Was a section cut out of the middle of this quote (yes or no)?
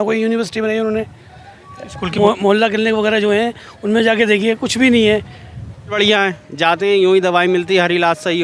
yes